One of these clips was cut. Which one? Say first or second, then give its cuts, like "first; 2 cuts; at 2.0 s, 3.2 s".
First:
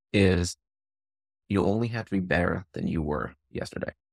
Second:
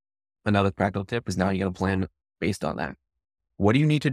first; 1 cut; at 1.3 s